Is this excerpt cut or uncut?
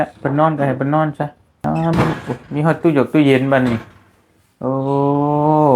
cut